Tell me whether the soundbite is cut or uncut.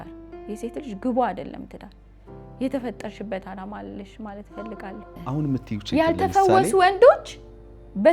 cut